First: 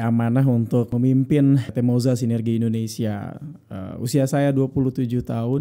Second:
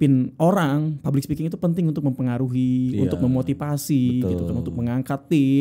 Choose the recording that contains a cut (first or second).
first